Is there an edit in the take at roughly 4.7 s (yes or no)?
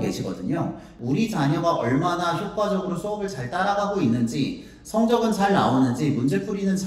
no